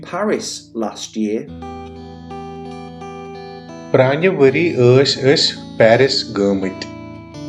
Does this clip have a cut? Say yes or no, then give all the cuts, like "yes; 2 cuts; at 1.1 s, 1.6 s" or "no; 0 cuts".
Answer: no; 0 cuts